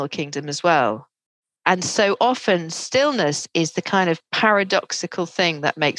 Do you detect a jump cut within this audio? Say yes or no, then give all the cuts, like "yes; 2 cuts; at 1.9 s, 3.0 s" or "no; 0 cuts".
no; 0 cuts